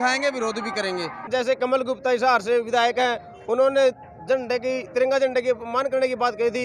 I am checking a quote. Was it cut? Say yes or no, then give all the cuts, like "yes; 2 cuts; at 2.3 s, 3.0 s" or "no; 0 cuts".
yes; 1 cut; at 1.3 s